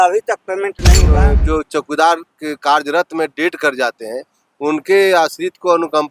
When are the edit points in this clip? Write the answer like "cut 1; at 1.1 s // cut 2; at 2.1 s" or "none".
cut 1; at 1.1 s